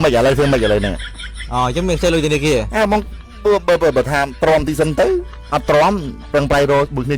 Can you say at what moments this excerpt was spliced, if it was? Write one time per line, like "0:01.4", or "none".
none

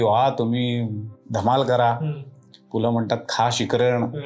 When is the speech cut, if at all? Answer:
none

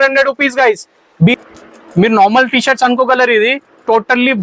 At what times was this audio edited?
0:01.3

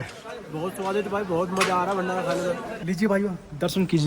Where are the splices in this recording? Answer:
0:02.7

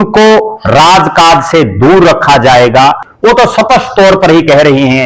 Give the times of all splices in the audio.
0:03.1

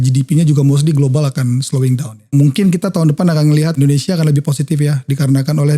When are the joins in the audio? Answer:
0:02.3
0:03.8

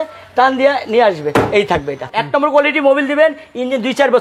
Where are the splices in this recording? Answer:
0:02.1

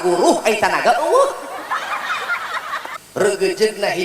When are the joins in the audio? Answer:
0:03.0

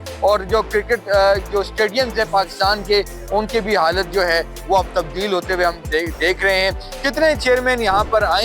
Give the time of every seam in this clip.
none

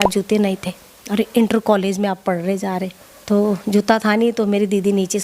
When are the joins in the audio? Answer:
0:03.1

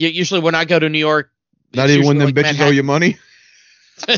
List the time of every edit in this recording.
none

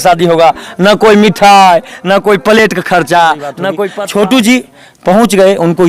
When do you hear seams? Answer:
0:03.9

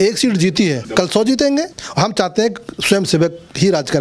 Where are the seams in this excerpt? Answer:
0:00.8
0:01.8

